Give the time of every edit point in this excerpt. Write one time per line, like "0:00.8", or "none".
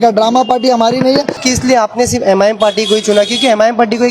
0:01.4